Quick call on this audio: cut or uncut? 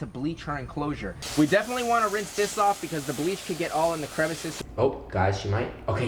cut